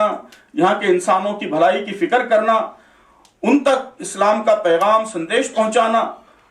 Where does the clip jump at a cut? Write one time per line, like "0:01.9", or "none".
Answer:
none